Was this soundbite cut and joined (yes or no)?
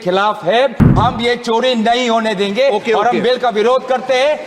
yes